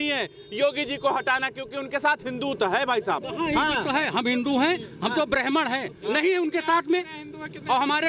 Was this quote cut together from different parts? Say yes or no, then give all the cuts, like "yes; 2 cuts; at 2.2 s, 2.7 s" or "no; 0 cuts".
no; 0 cuts